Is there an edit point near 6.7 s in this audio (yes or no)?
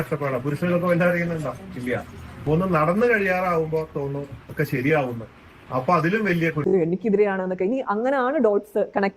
yes